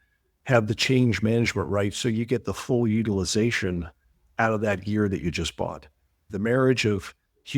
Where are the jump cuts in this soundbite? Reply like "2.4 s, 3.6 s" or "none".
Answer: 6.3 s